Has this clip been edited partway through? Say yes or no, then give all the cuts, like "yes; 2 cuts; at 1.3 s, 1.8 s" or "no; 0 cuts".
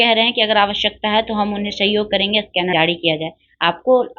yes; 1 cut; at 2.7 s